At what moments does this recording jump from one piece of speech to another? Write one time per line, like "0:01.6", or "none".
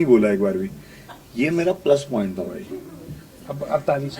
none

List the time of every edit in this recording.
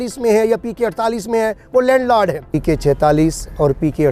0:02.5

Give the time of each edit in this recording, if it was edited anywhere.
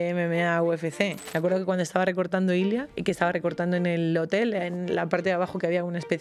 0:01.2
0:02.9

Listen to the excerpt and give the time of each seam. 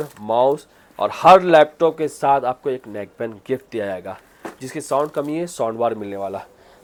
none

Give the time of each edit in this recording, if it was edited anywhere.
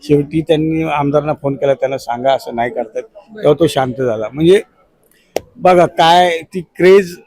none

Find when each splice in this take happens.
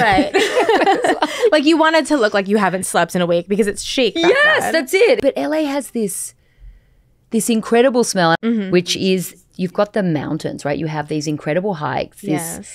0:05.2
0:08.4
0:09.5

